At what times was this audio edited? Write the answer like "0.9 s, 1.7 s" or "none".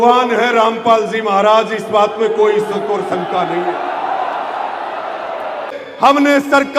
5.8 s